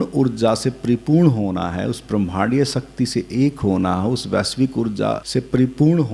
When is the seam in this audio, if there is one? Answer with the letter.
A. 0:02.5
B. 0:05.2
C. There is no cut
B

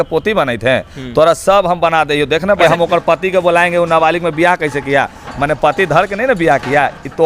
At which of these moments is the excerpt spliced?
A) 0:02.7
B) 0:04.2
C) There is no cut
A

